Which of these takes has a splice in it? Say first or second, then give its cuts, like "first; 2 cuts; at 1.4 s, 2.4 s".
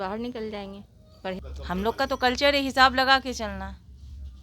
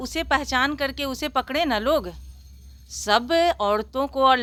first; 1 cut; at 1.4 s